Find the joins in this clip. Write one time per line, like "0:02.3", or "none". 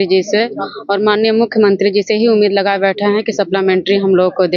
none